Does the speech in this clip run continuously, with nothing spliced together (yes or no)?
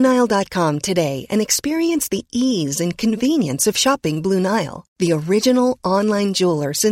yes